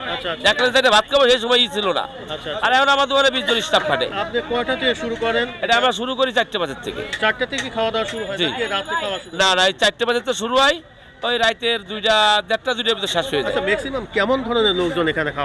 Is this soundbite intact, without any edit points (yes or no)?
yes